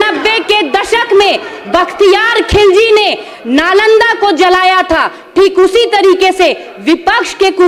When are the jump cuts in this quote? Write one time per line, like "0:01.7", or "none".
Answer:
none